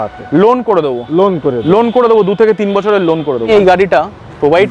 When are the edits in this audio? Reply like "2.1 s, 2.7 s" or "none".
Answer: 3.5 s